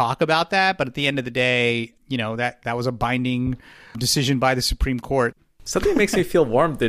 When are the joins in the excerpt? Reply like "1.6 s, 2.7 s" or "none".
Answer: 5.4 s

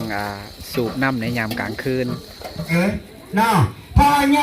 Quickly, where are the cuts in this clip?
2.7 s

